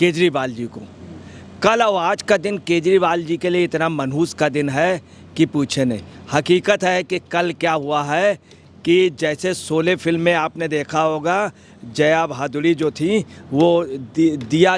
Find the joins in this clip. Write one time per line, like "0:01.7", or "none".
none